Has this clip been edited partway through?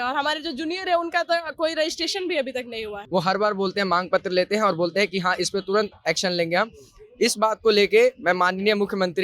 yes; 1 cut; at 3.0 s

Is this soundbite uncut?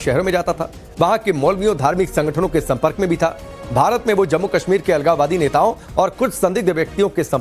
no; 1 cut; at 5.2 s

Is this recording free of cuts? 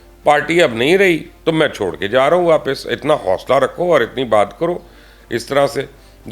yes; 0 cuts

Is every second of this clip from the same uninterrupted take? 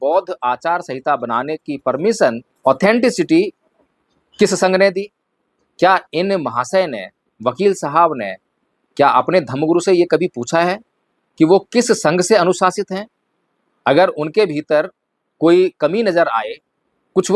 no; 1 cut; at 2.5 s

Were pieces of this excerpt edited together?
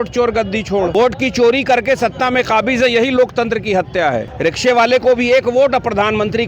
yes; 2 cuts; at 0.9 s, 4.3 s

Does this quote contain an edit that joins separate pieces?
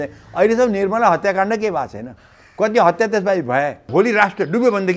yes; 1 cut; at 3.9 s

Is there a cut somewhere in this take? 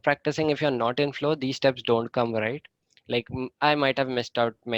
no; 0 cuts

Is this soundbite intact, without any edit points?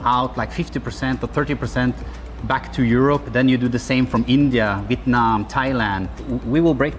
yes; 0 cuts

